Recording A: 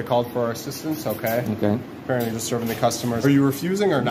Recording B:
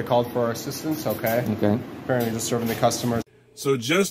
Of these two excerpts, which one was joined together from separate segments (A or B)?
A